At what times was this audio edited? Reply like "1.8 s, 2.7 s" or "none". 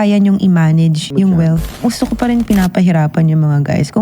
1.0 s, 1.7 s